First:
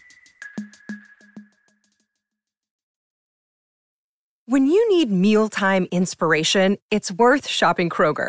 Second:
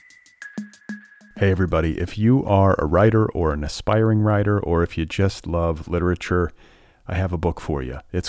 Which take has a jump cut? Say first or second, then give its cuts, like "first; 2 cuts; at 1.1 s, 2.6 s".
second; 1 cut; at 0.9 s